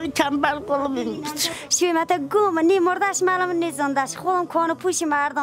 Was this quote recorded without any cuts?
no; 1 cut; at 1.5 s

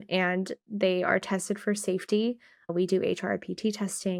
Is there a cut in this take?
no; 0 cuts

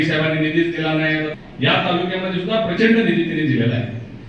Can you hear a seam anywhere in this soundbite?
yes; 1 cut; at 1.4 s

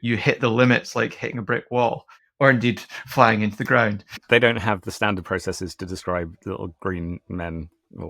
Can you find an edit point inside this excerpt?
no; 0 cuts

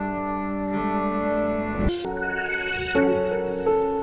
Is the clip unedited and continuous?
no; 1 cut; at 1.9 s

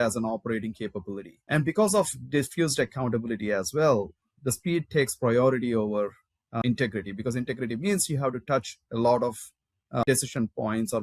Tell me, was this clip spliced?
yes; 3 cuts; at 1.3 s, 6.6 s, 10.0 s

